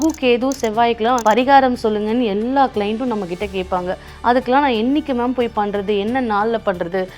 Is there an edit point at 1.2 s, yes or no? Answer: yes